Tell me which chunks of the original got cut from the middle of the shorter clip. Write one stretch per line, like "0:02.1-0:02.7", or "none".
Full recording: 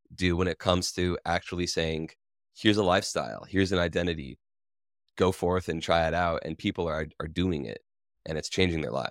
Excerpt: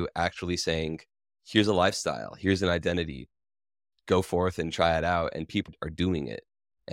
0:06.8-0:07.0